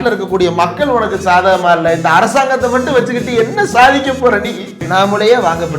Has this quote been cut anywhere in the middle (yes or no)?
yes